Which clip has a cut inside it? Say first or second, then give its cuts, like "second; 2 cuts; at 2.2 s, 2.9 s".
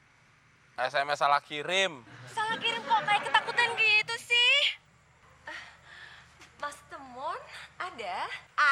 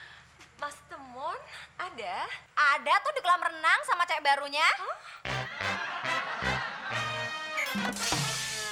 first; 1 cut; at 4.8 s